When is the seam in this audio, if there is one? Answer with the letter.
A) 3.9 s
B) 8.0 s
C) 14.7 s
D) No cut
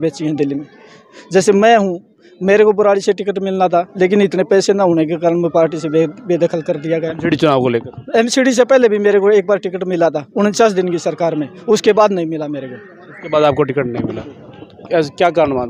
D